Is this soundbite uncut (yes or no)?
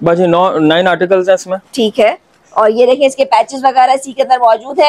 yes